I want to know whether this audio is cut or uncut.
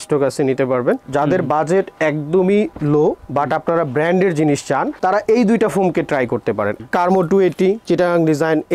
cut